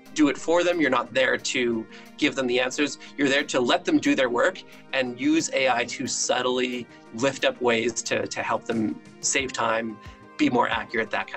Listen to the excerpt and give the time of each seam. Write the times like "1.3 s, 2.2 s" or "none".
none